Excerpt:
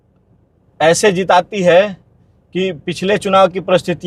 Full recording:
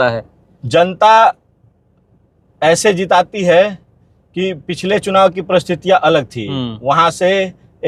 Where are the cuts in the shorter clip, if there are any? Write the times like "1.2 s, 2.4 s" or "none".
none